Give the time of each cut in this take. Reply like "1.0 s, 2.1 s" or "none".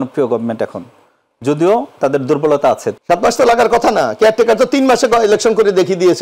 2.9 s

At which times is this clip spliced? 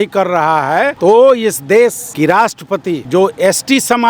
0.9 s, 2.0 s, 3.0 s

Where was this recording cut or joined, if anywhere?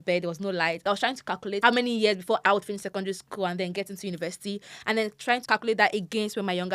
1.2 s, 2.4 s, 5.4 s

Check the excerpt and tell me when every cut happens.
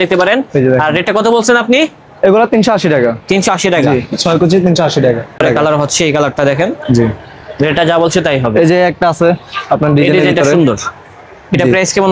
5.4 s

